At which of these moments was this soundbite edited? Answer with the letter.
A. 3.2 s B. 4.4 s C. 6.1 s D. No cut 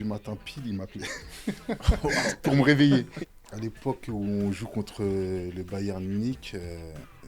A